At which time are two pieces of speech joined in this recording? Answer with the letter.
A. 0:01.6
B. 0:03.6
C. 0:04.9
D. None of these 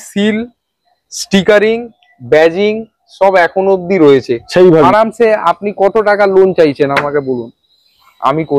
C